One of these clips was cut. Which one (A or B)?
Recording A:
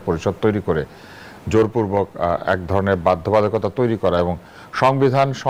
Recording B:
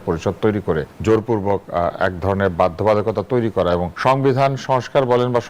B